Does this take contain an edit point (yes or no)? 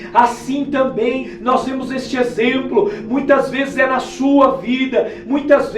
no